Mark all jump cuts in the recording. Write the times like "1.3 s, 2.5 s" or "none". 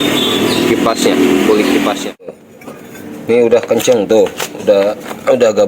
2.4 s